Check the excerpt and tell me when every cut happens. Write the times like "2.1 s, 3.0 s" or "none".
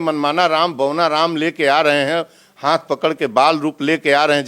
none